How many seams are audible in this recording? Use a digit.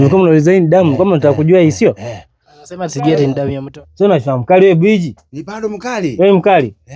1